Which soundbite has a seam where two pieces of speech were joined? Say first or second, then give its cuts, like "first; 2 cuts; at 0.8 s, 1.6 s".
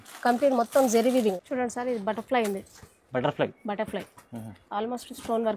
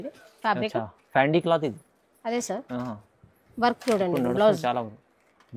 first; 1 cut; at 1.3 s